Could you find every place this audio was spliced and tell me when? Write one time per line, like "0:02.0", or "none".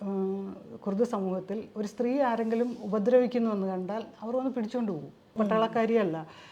0:05.3